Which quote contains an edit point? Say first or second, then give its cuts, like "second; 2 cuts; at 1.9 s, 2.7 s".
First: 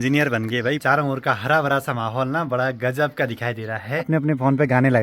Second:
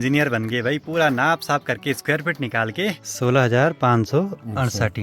first; 2 cuts; at 0.8 s, 4.1 s